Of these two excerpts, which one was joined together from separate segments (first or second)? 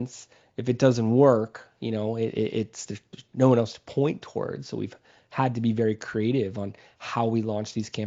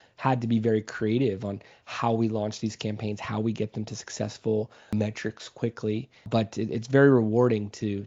second